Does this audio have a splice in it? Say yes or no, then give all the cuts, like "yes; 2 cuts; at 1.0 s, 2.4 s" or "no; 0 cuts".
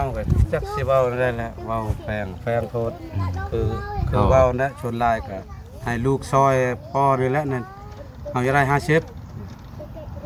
no; 0 cuts